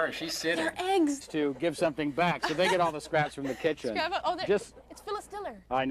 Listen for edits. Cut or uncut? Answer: uncut